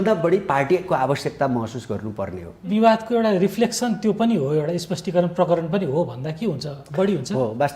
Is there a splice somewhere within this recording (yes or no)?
yes